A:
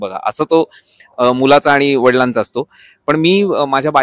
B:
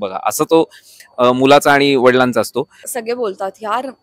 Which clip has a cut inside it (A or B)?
B